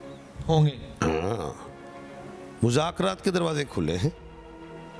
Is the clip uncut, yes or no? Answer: yes